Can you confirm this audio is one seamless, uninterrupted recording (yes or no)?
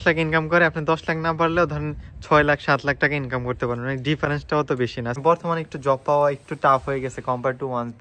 no